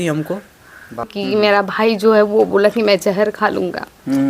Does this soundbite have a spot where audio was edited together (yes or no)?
yes